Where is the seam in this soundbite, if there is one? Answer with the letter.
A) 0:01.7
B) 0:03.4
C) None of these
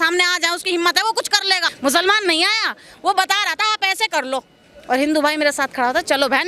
A